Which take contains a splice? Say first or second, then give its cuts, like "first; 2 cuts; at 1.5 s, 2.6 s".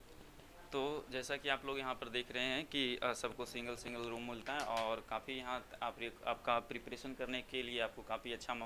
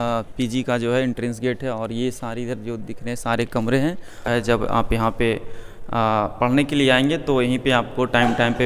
second; 1 cut; at 4.3 s